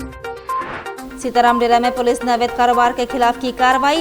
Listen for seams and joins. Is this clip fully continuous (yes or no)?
no